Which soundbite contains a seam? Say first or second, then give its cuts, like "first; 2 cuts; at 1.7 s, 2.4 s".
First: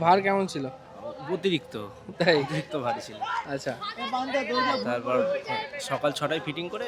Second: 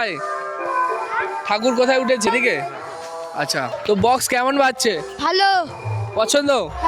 second; 2 cuts; at 2.3 s, 3.7 s